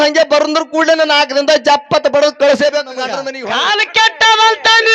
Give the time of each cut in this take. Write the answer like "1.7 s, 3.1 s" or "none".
3.3 s